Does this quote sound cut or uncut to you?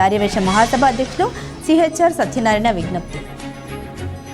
cut